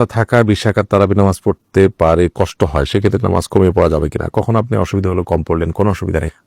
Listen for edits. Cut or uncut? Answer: uncut